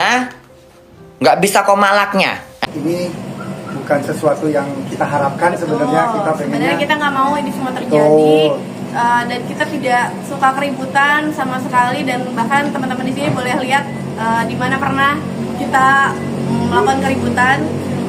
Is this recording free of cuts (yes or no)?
no